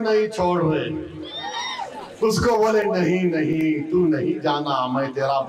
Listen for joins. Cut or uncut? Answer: uncut